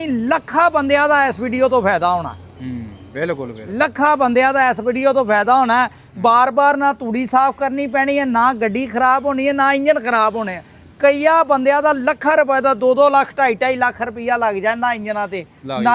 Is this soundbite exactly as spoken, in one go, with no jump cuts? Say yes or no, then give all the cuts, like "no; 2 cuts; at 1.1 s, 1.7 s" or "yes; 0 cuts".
yes; 0 cuts